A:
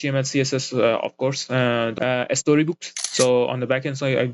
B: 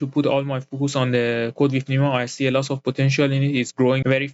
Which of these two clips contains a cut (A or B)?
A